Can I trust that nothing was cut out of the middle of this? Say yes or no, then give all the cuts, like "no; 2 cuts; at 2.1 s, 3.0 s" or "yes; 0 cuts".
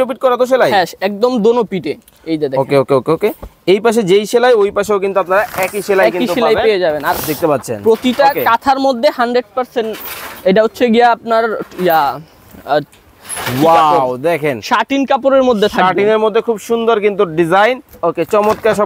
no; 1 cut; at 17.9 s